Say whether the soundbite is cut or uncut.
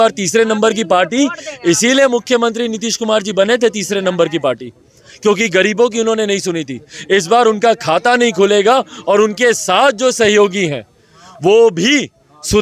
uncut